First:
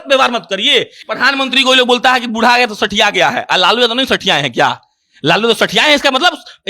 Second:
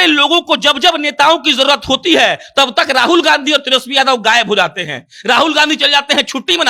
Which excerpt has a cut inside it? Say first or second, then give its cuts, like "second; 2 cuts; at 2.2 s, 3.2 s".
first; 1 cut; at 1.0 s